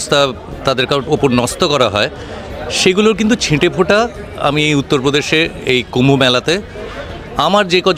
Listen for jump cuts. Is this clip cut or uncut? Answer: uncut